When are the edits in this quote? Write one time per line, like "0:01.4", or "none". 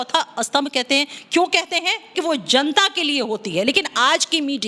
0:02.1